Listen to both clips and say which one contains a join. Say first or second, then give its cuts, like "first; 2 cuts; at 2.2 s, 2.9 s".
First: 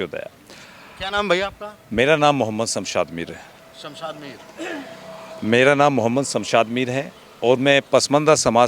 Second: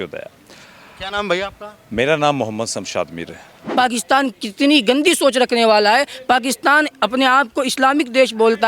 second; 1 cut; at 3.6 s